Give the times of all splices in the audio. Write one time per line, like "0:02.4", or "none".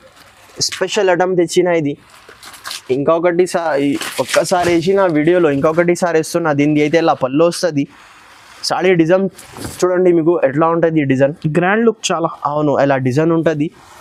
none